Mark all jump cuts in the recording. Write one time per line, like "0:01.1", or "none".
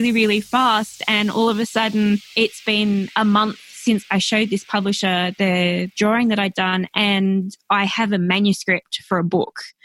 0:02.3
0:04.0
0:05.9

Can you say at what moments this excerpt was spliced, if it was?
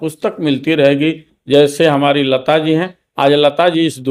none

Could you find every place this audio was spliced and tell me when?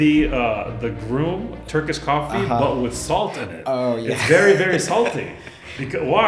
0:01.6

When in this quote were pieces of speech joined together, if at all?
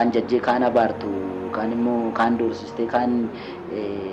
none

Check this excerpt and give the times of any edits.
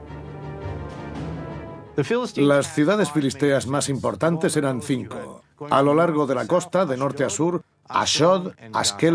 0:05.5

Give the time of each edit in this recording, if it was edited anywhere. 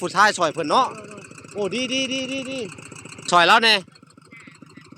0:03.1

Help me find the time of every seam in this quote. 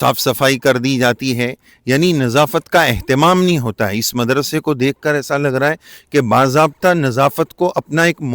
none

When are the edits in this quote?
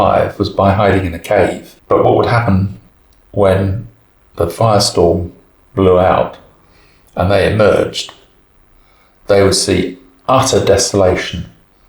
0:01.7

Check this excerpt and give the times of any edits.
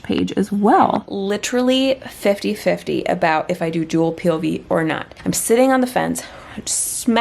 0:01.1

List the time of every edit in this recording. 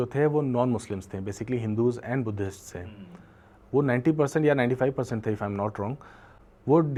none

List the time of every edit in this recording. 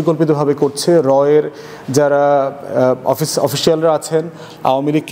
none

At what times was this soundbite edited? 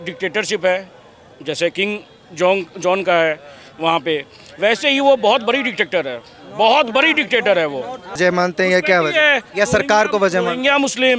0:08.2

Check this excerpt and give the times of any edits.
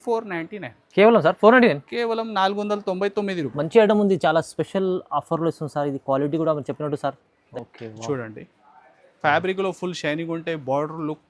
0:07.4

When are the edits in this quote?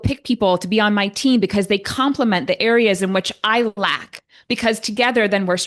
none

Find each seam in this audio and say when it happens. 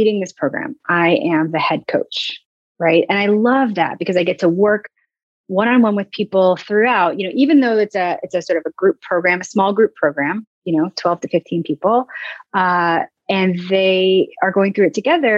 none

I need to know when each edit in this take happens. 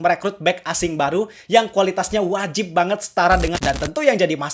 0:03.6

